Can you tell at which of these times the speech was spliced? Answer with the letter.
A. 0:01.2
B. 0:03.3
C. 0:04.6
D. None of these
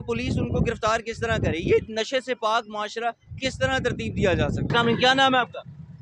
C